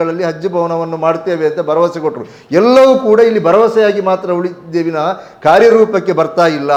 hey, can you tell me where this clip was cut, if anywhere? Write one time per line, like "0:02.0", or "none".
none